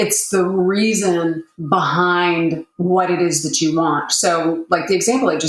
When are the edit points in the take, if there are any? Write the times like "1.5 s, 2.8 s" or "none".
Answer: 1.5 s